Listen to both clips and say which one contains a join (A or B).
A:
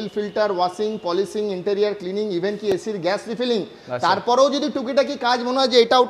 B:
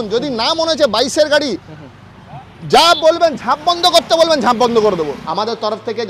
B